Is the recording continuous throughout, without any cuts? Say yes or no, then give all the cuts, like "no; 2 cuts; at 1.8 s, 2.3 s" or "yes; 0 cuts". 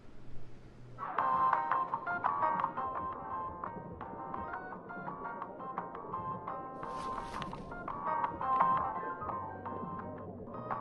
no; 1 cut; at 0.9 s